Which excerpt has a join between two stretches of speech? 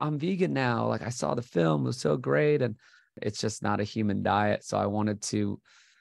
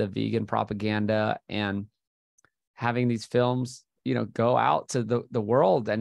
first; 1 cut; at 3.2 s

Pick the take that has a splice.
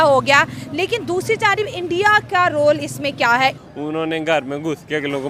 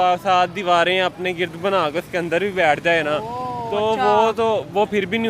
first; 1 cut; at 3.6 s

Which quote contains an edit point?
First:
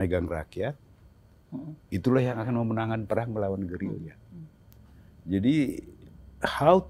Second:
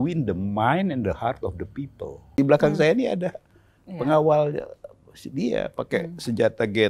second; 1 cut; at 2.3 s

